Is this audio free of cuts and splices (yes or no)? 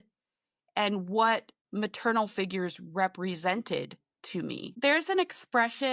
no